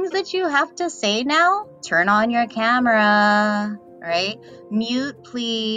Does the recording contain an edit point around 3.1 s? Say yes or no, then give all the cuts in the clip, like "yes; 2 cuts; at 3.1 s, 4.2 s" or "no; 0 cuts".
no; 1 cut; at 1.8 s